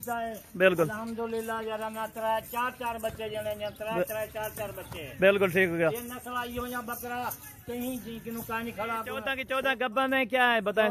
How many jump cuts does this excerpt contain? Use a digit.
1